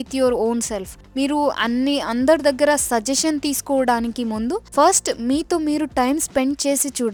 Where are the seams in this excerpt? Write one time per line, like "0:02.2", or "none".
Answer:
none